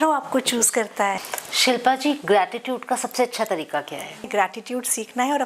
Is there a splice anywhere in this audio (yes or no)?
yes